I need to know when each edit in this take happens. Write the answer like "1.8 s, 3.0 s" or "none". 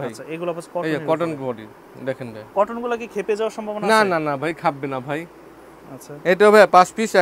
none